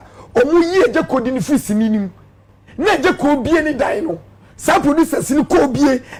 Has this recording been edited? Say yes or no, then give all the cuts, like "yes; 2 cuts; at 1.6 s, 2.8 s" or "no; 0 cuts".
no; 0 cuts